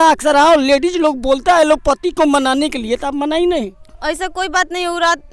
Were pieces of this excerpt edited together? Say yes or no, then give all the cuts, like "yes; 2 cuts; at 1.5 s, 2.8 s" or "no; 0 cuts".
no; 0 cuts